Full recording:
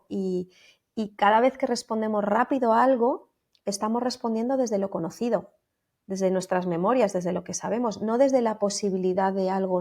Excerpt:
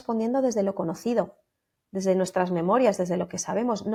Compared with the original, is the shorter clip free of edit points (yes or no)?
yes